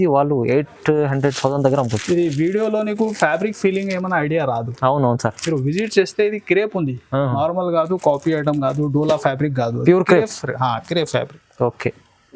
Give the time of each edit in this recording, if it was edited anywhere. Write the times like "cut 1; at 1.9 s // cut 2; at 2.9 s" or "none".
none